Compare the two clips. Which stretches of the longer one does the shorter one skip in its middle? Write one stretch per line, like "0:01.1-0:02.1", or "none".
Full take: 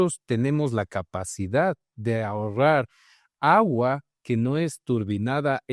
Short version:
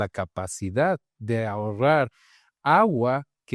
none